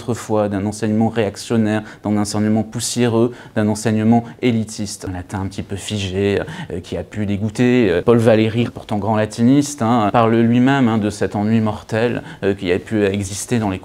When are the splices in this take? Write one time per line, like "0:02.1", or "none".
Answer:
none